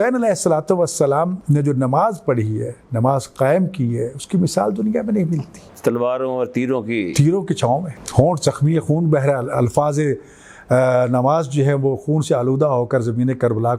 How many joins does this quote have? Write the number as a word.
two